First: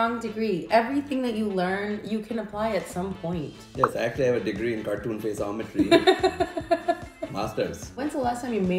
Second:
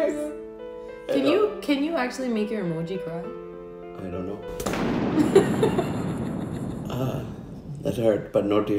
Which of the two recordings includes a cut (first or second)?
first